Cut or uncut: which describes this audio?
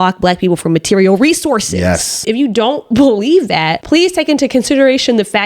cut